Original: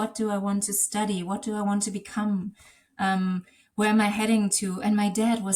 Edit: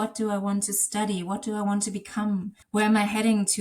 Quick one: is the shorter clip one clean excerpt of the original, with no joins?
no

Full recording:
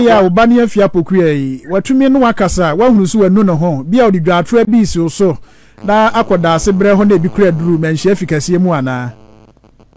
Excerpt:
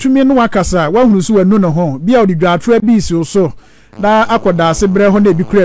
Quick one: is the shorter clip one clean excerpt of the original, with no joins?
yes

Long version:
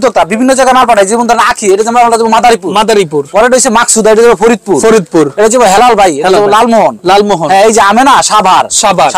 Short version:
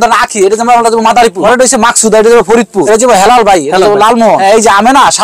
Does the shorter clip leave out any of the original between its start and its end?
yes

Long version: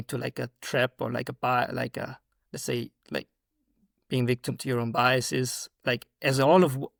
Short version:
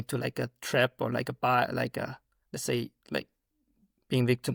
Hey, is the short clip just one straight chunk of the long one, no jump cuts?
yes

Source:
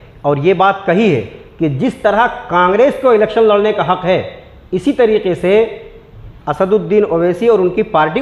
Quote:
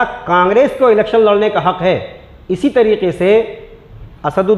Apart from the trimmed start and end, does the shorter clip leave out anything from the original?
no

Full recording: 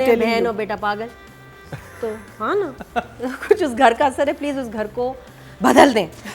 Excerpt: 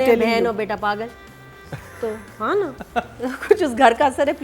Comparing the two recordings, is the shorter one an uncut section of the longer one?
yes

